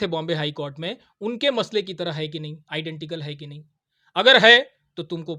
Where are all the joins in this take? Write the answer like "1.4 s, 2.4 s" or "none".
none